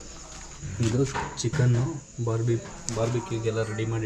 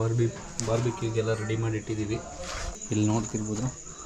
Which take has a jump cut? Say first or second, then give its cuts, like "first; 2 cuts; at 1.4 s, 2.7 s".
second; 1 cut; at 2.7 s